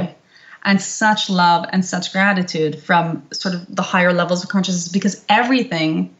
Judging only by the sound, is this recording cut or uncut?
uncut